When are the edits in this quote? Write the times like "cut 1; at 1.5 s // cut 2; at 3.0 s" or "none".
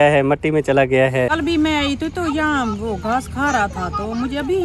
cut 1; at 1.3 s